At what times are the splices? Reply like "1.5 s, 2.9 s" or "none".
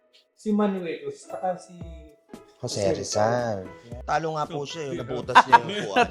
none